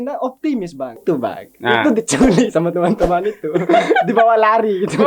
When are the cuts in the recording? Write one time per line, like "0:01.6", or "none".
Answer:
0:01.0